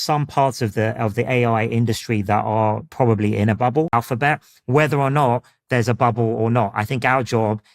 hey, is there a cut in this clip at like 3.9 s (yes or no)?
yes